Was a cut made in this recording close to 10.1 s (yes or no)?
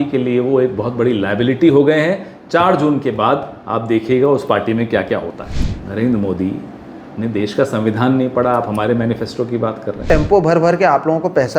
yes